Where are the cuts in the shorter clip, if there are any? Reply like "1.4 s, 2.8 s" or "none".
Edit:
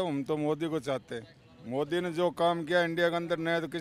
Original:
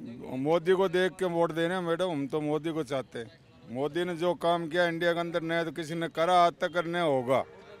none